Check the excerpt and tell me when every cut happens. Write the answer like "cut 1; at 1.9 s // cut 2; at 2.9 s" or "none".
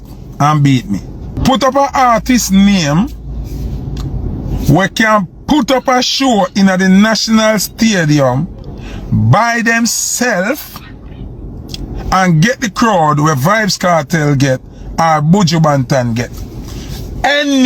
cut 1; at 1.3 s

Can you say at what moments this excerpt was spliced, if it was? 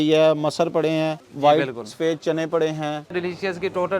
cut 1; at 1.2 s // cut 2; at 3.2 s

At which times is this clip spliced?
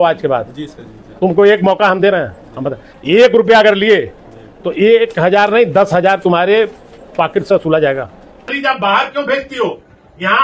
none

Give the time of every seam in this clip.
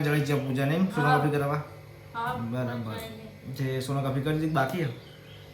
none

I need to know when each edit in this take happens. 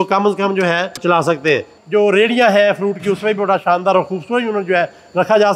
cut 1; at 1.0 s // cut 2; at 1.7 s

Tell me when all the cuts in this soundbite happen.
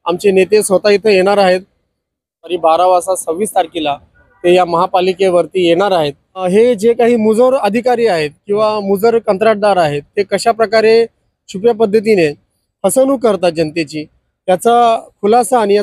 cut 1; at 2.5 s // cut 2; at 6.4 s

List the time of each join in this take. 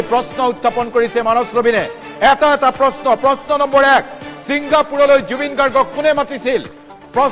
cut 1; at 5.9 s

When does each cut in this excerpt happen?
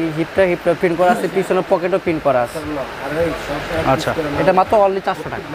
none

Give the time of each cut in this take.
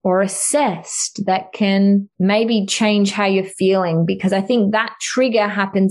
cut 1; at 2.1 s

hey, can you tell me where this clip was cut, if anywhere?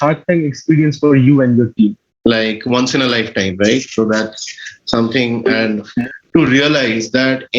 cut 1; at 2.1 s // cut 2; at 5.9 s

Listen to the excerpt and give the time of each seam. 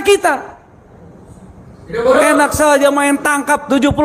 none

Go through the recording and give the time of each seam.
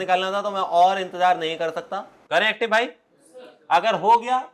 cut 1; at 2.2 s

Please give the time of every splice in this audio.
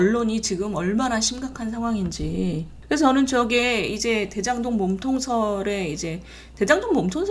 cut 1; at 2.7 s

